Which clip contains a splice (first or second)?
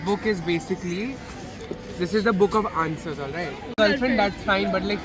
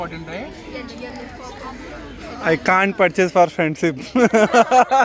first